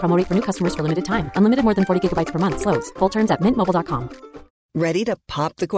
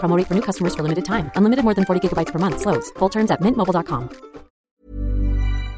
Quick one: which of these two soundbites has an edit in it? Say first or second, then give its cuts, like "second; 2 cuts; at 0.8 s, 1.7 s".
second; 1 cut; at 4.6 s